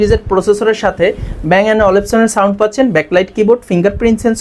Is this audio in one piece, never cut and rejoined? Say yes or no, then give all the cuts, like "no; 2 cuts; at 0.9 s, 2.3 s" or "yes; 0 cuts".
yes; 0 cuts